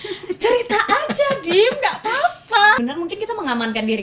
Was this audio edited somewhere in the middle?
yes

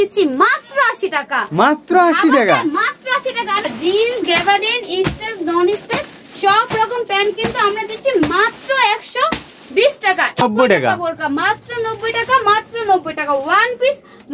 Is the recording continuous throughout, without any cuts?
no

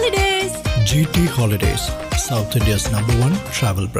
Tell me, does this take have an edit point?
no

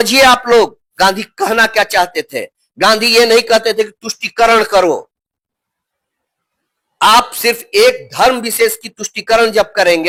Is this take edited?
no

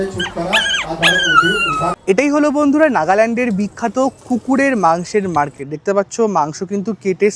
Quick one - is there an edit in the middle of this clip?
yes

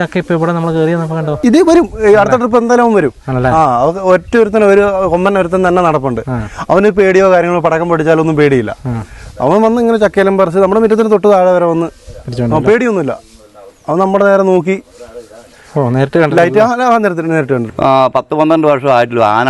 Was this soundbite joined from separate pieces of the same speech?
yes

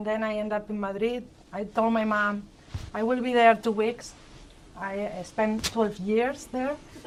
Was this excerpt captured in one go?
yes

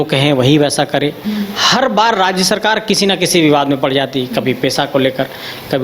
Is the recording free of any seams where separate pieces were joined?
no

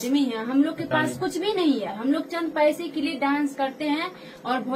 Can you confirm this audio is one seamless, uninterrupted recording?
yes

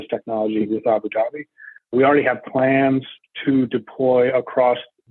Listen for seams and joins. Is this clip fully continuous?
no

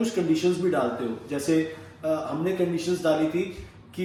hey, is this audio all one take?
yes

